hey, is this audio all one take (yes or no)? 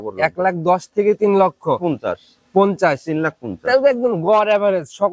yes